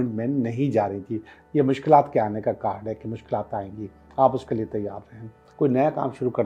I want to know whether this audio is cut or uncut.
cut